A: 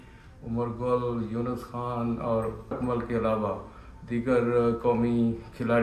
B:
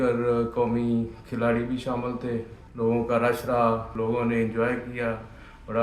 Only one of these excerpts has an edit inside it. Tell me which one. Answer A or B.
B